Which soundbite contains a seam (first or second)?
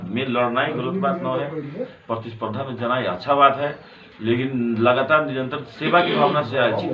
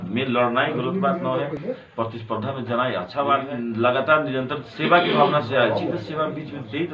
second